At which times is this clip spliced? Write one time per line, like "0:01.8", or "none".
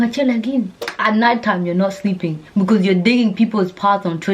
0:00.9